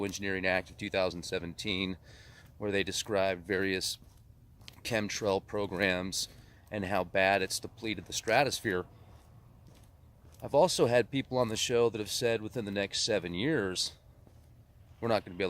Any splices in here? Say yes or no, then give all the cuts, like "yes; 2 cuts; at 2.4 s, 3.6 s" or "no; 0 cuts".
yes; 1 cut; at 12.5 s